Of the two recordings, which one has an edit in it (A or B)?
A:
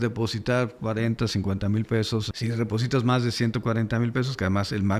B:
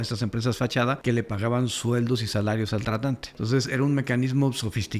B